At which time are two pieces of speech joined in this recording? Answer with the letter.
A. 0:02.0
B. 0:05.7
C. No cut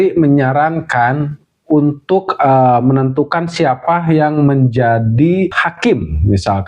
B